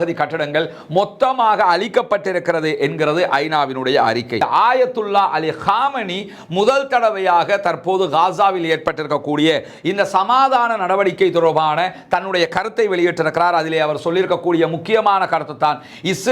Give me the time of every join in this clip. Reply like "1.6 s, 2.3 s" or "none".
4.4 s